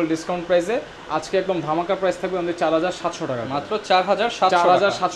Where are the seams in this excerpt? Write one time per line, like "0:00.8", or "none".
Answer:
none

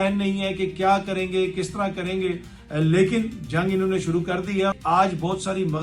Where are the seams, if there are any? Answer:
0:04.8

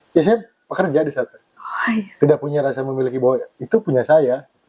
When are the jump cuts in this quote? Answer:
none

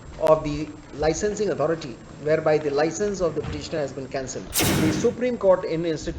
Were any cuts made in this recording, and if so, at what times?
0:04.7

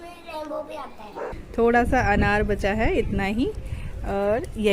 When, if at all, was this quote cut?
0:01.2

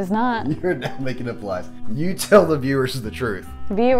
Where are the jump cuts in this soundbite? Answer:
0:01.7

